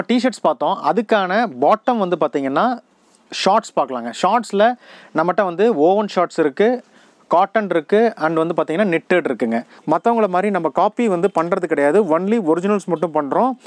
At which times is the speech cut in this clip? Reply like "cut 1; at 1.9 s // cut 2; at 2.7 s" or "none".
cut 1; at 9.7 s